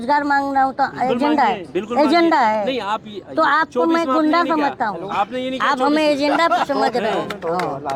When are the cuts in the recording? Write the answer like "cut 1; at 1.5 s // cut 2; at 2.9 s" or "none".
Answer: none